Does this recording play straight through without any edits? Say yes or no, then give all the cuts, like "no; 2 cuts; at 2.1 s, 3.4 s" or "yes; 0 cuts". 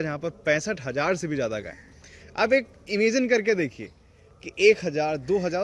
yes; 0 cuts